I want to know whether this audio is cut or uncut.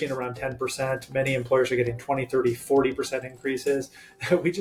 uncut